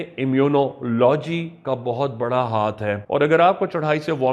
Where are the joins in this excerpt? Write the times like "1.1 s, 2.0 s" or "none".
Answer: 3.0 s